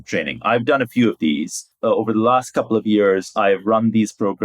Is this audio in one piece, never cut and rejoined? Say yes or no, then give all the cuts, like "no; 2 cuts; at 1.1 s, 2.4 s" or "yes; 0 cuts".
no; 1 cut; at 1.7 s